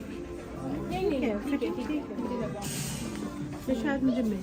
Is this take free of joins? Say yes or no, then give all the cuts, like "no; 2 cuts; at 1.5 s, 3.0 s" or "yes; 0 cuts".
yes; 0 cuts